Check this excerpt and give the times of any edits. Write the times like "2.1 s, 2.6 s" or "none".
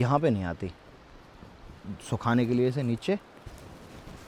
none